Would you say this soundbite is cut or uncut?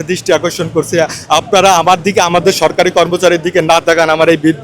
uncut